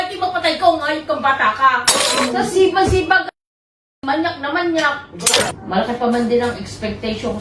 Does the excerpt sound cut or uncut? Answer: uncut